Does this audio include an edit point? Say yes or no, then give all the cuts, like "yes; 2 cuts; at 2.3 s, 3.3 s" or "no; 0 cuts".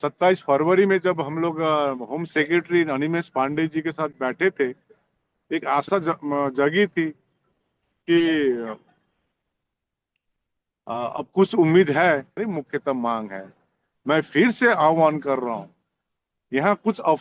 yes; 1 cut; at 12.4 s